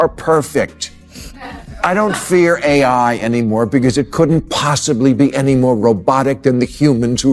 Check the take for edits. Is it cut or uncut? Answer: uncut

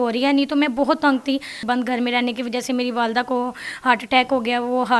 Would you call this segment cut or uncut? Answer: cut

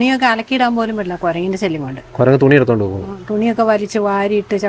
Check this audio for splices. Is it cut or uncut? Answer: uncut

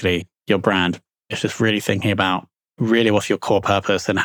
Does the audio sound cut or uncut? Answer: cut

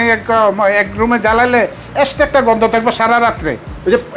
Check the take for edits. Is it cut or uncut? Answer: uncut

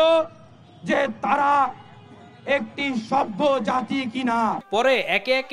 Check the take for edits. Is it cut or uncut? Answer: uncut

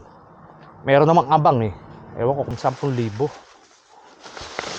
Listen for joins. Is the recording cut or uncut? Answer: cut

